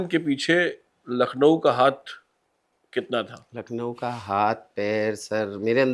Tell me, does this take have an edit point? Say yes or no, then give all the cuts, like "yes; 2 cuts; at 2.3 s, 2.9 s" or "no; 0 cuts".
no; 0 cuts